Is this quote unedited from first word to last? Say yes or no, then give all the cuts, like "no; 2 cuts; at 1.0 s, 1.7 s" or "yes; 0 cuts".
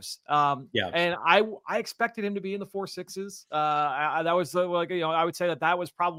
yes; 0 cuts